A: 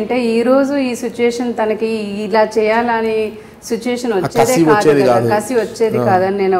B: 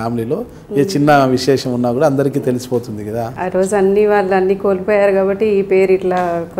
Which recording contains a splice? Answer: B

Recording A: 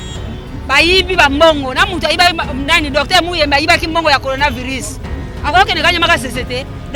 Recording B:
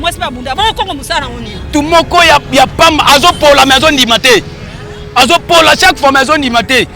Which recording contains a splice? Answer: B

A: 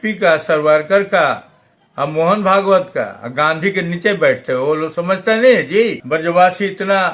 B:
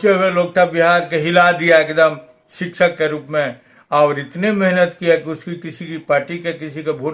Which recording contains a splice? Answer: A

